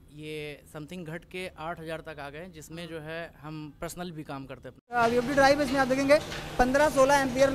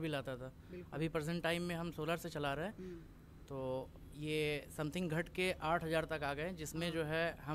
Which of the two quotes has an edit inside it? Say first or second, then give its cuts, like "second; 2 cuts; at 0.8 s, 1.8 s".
first; 1 cut; at 5.0 s